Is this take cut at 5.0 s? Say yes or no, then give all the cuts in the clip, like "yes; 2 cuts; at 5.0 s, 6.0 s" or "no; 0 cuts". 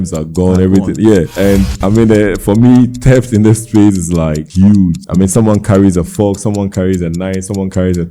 yes; 3 cuts; at 1.3 s, 4.4 s, 5.0 s